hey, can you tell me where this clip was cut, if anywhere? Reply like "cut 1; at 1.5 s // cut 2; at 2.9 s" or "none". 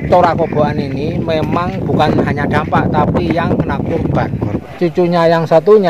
cut 1; at 4.5 s